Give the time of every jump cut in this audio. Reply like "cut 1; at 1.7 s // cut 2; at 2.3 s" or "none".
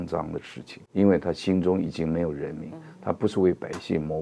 none